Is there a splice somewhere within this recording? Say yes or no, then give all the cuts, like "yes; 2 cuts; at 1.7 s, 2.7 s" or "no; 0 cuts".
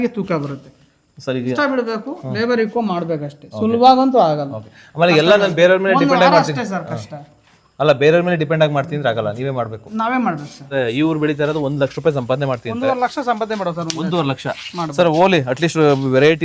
yes; 2 cuts; at 1.6 s, 10.6 s